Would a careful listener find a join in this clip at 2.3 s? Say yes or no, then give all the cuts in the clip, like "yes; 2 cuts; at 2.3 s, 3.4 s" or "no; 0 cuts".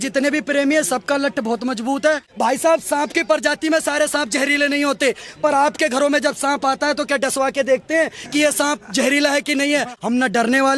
yes; 2 cuts; at 2.3 s, 9.9 s